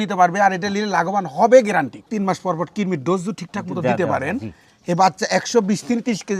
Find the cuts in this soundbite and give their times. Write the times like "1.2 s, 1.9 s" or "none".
2.0 s